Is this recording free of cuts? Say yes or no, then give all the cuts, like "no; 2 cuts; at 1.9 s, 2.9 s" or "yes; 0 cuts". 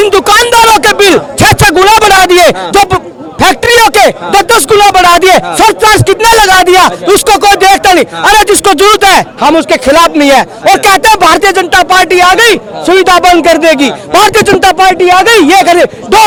yes; 0 cuts